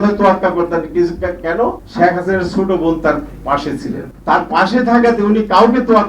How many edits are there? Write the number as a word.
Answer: two